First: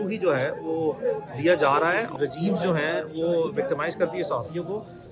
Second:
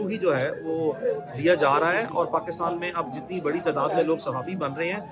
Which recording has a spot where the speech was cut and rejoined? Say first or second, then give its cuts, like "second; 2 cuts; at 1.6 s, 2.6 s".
first; 1 cut; at 2.1 s